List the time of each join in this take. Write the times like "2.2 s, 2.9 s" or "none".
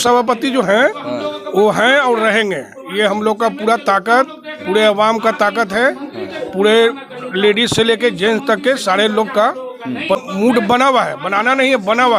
10.2 s

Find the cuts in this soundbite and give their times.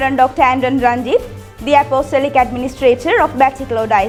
none

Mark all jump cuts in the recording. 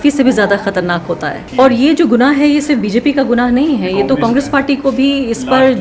1.4 s

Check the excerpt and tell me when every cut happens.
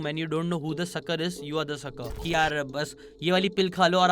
2.3 s

